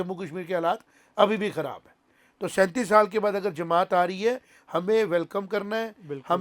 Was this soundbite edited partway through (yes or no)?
no